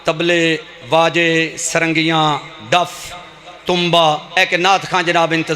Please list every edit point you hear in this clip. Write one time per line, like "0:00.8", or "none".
0:04.4